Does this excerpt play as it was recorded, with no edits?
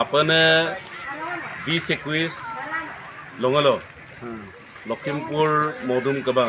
yes; 0 cuts

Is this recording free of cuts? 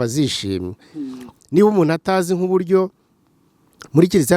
no; 1 cut; at 1.3 s

